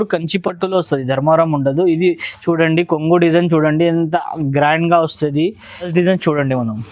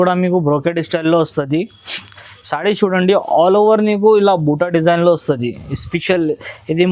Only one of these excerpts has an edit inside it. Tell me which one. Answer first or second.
first